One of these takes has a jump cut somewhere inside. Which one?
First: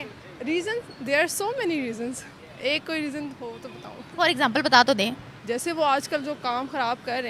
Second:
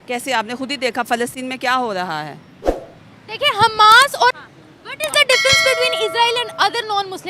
second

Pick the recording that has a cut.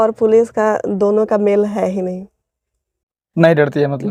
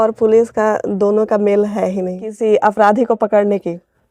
second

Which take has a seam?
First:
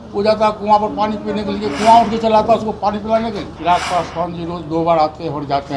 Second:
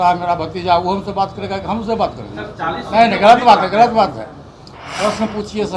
first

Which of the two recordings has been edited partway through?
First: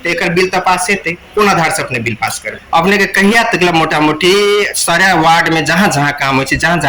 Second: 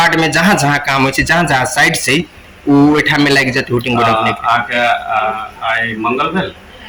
first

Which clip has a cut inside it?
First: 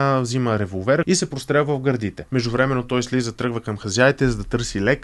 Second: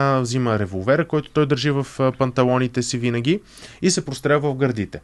first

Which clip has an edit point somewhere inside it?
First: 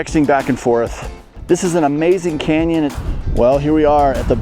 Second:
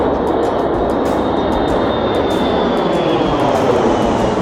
first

